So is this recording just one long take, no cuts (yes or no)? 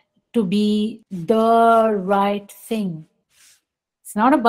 no